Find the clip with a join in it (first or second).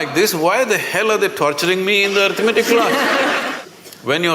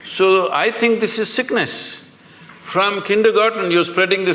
first